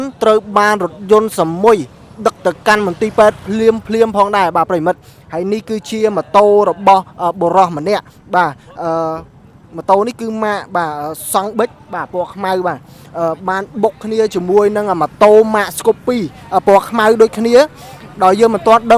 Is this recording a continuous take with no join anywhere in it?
yes; 0 cuts

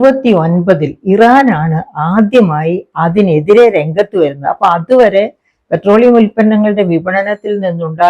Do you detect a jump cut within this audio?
no; 0 cuts

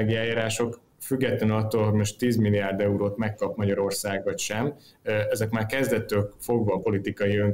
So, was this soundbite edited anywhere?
no; 0 cuts

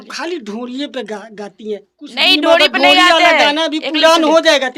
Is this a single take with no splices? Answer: yes; 0 cuts

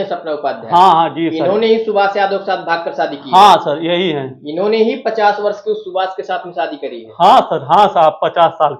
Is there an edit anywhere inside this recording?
no; 0 cuts

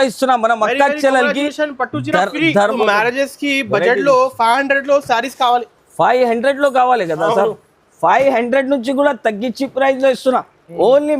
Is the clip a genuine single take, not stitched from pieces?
no; 1 cut; at 2.7 s

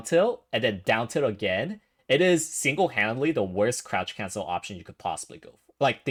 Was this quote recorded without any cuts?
yes; 0 cuts

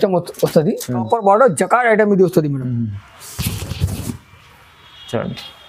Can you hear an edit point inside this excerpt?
yes; 1 cut; at 1.0 s

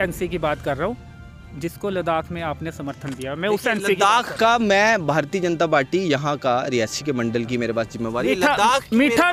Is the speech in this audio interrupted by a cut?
no; 0 cuts

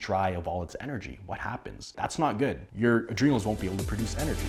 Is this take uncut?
yes; 0 cuts

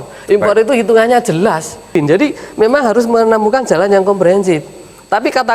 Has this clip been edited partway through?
yes; 1 cut; at 1.9 s

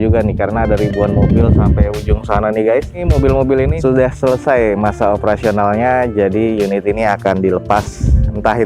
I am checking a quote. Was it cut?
no; 0 cuts

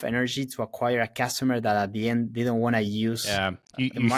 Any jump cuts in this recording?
no; 0 cuts

